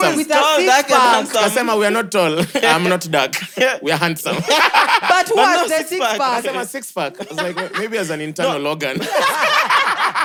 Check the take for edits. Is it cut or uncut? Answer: uncut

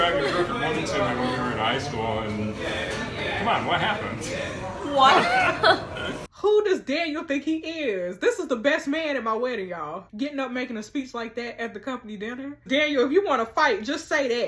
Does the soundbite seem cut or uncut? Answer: cut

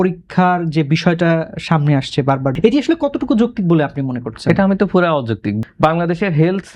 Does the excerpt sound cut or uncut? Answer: cut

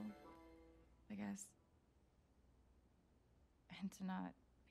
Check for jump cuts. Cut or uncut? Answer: cut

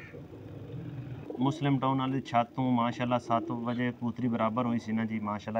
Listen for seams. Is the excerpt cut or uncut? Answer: cut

